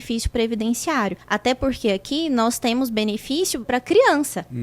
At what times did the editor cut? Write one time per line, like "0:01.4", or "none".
0:01.2
0:03.7